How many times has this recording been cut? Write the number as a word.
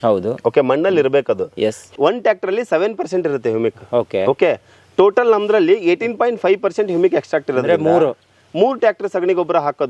one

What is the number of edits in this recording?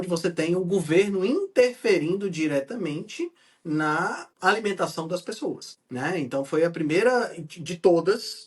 two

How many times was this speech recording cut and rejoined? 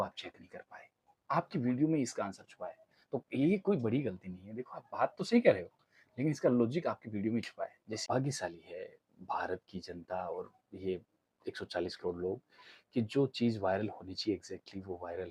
one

